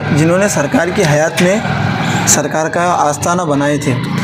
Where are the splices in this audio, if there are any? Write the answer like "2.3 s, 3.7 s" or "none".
none